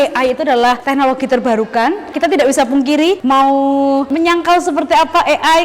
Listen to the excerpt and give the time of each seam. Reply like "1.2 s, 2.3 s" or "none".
0.8 s, 2.1 s, 4.1 s